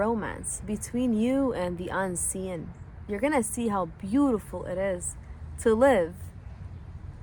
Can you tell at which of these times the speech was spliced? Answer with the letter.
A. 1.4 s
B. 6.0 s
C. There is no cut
C